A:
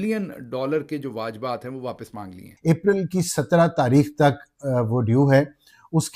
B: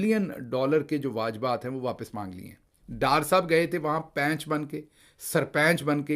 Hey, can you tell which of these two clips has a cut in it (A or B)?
A